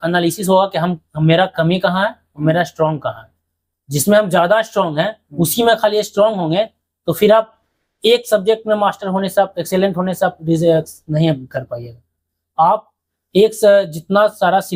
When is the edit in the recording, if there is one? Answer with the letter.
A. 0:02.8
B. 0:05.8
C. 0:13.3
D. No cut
D